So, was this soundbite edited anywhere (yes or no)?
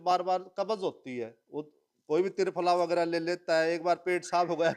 no